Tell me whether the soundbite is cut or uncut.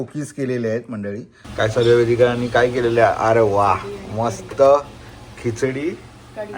cut